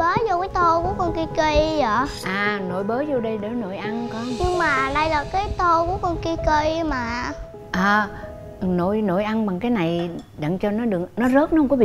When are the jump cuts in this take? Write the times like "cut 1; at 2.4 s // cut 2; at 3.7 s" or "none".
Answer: none